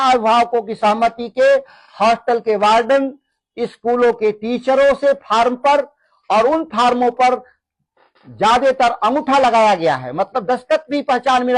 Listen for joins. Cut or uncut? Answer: uncut